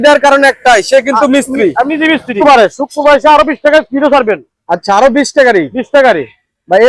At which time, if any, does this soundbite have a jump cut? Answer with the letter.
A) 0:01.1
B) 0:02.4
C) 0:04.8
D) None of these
B